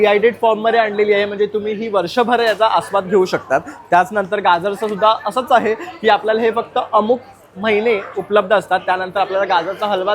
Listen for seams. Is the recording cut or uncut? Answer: uncut